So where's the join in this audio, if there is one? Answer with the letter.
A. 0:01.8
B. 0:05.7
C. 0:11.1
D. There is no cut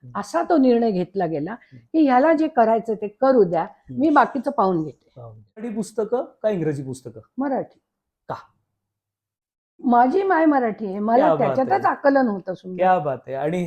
B